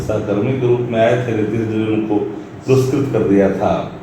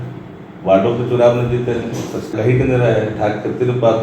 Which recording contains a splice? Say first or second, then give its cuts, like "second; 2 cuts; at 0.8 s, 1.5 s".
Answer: second; 1 cut; at 2.3 s